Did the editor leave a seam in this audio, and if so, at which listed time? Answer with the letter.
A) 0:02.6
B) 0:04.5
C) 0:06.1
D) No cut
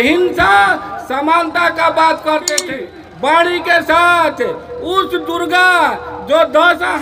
A